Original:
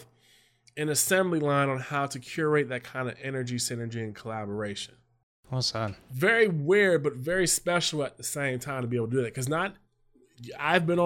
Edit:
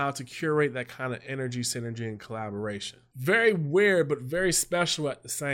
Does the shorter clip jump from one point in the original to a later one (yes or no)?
yes